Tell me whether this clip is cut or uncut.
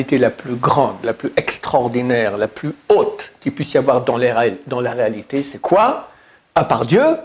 uncut